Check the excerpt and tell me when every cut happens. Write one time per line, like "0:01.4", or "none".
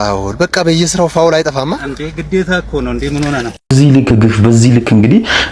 0:03.7